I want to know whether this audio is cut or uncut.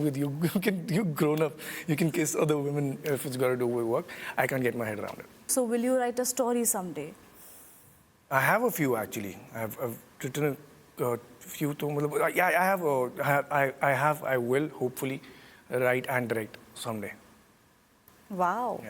cut